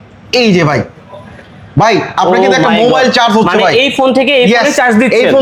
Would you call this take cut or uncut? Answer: uncut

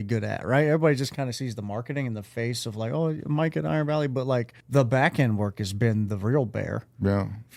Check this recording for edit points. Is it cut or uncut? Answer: cut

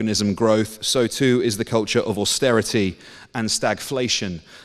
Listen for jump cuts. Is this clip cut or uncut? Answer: uncut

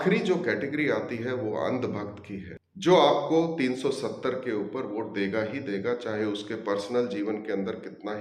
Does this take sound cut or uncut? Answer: uncut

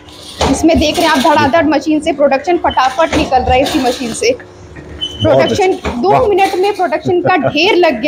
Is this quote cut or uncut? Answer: uncut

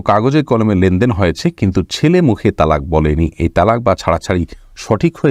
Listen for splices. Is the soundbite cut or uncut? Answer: uncut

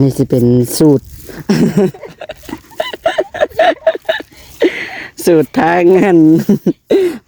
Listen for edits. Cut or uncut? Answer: uncut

